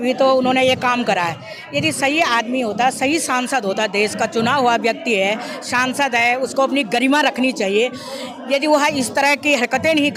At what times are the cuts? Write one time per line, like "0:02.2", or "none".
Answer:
none